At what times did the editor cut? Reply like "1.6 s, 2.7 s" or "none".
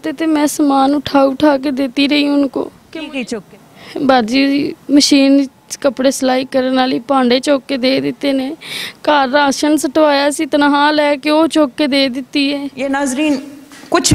3.3 s, 12.8 s